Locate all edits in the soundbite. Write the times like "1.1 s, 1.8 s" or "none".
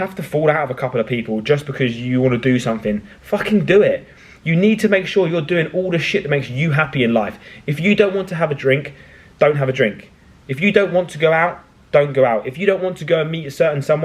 none